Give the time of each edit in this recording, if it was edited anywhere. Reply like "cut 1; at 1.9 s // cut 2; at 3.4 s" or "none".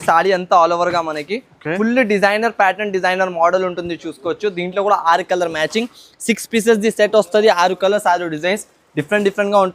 none